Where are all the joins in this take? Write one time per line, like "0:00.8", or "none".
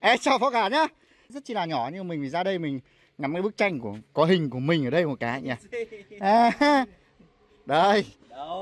0:01.3

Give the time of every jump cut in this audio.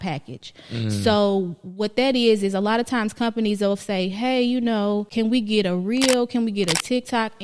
0:05.1

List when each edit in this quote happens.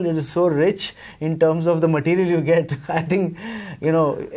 none

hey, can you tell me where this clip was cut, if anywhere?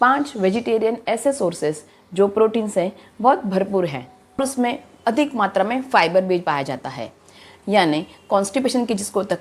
0:04.4

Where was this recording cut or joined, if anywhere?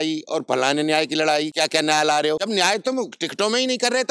0:01.5
0:02.4

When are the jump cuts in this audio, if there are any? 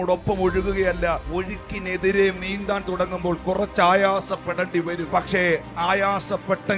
0:01.2
0:05.0

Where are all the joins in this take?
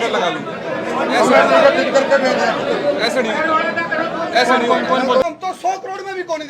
0:05.2

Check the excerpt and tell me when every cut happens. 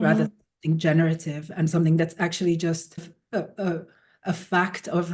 0:03.0

